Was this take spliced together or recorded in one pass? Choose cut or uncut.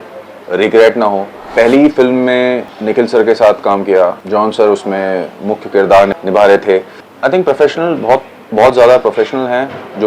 cut